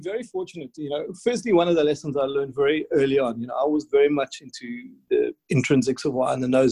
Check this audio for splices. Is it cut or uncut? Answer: cut